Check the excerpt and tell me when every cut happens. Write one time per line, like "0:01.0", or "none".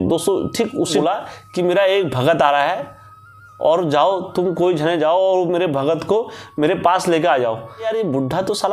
0:01.0
0:07.8